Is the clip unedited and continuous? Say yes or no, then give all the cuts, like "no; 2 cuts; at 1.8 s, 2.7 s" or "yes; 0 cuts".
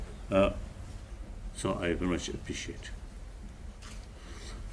no; 1 cut; at 2.9 s